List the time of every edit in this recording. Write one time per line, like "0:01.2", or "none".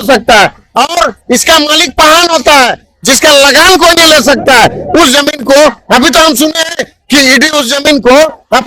none